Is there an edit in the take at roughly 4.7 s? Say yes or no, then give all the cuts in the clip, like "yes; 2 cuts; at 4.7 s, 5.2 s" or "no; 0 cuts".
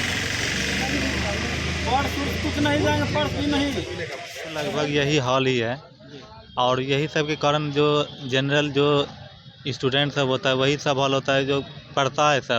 yes; 1 cut; at 4.7 s